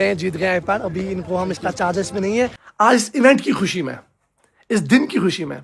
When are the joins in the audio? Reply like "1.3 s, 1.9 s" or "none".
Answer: 2.6 s